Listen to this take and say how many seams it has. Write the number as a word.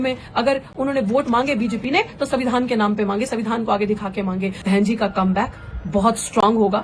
one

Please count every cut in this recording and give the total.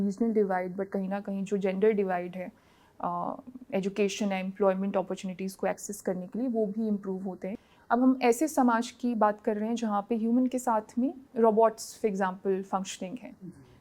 two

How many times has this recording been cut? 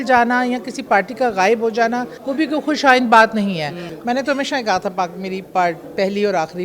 two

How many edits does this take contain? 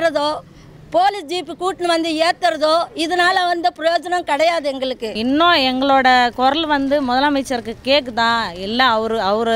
one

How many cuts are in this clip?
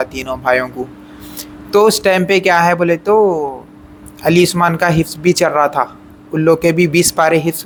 zero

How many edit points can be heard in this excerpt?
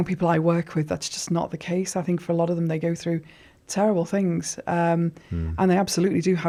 zero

